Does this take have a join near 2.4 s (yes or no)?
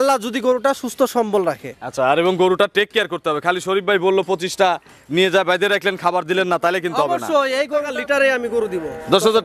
no